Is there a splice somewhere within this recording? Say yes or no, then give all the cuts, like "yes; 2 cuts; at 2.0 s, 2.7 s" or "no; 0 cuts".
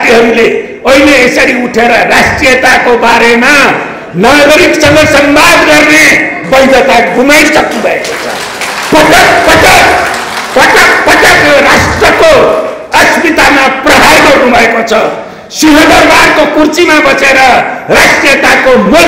no; 0 cuts